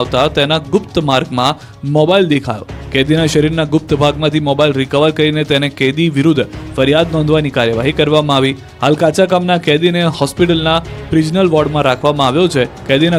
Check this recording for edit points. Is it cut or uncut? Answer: uncut